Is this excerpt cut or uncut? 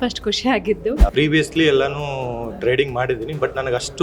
cut